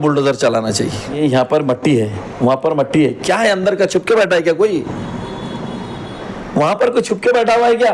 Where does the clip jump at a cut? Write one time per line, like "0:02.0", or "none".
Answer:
0:01.2